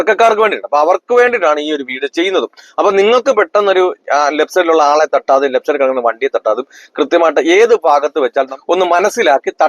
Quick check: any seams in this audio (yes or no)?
yes